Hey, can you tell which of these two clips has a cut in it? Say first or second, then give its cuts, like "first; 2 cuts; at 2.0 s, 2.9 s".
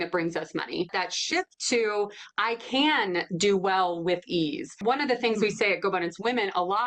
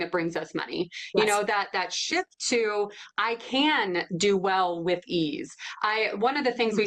first; 2 cuts; at 0.9 s, 4.8 s